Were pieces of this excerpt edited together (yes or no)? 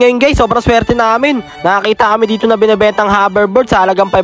no